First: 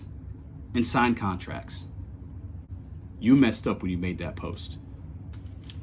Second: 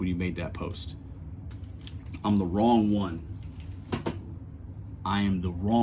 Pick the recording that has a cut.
first; 1 cut; at 2.7 s

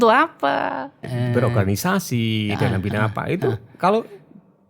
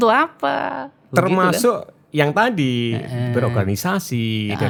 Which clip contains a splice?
first; 1 cut; at 1.0 s

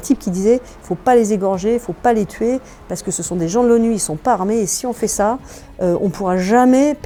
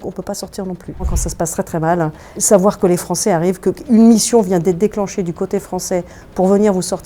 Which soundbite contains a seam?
second; 2 cuts; at 1.2 s, 2.4 s

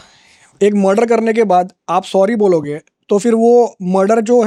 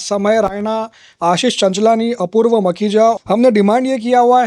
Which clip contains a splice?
second; 1 cut; at 3.1 s

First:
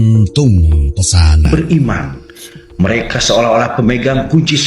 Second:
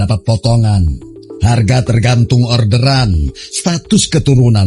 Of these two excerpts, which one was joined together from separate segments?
first; 1 cut; at 1.5 s

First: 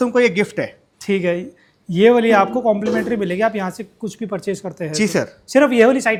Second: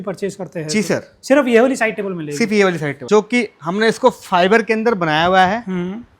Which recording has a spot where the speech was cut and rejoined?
second; 1 cut; at 2.9 s

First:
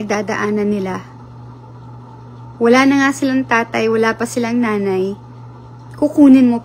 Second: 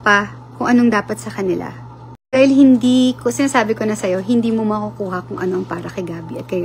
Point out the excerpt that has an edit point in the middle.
second; 1 cut; at 2.3 s

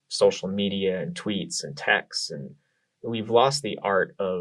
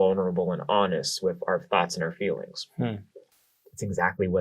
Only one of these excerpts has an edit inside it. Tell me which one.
second; 1 cut; at 3.1 s

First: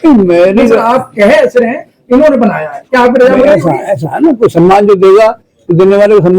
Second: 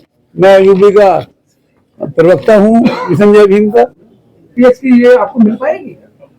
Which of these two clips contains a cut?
second; 1 cut; at 4.5 s

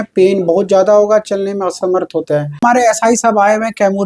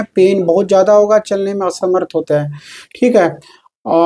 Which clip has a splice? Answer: first; 1 cut; at 2.6 s

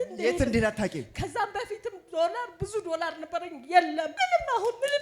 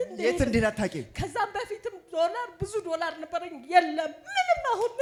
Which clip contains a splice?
first; 1 cut; at 4.1 s

